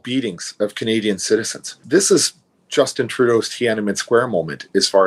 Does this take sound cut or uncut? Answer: uncut